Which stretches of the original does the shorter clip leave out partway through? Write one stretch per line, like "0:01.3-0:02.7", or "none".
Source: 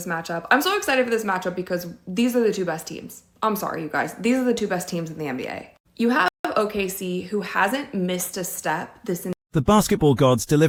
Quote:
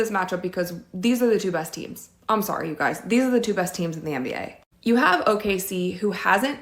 0:06.3-0:06.5